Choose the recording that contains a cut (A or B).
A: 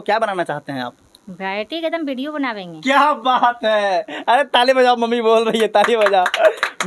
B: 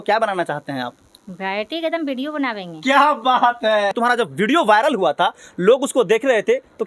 B